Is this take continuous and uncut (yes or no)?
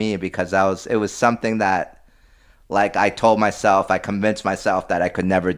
yes